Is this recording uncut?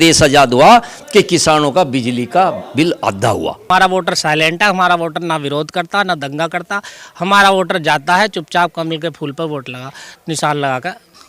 no; 1 cut; at 3.7 s

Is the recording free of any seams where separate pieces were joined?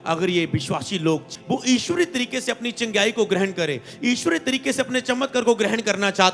no; 1 cut; at 1.3 s

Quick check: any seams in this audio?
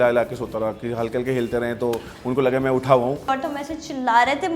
yes; 1 cut; at 3.2 s

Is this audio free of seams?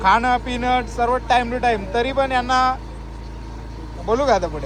yes; 0 cuts

